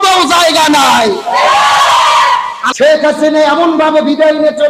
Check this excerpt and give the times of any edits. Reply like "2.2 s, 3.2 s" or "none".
2.6 s